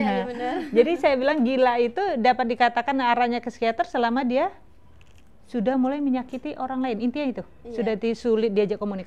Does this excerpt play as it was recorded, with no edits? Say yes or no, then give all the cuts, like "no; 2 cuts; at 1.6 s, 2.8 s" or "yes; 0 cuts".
yes; 0 cuts